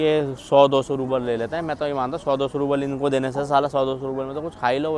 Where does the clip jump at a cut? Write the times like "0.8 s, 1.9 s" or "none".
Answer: none